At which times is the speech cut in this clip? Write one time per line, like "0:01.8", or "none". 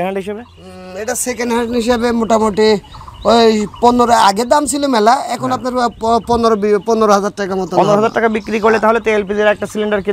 none